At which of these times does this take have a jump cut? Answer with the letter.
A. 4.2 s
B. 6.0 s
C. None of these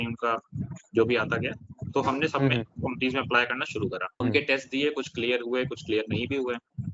A